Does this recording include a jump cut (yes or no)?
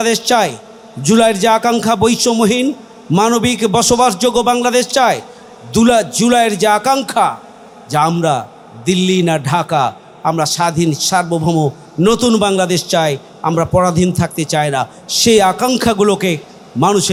no